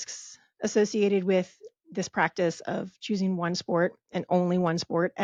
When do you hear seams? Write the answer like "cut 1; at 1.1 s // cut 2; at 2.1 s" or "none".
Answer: none